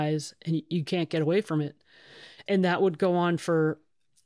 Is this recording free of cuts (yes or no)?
no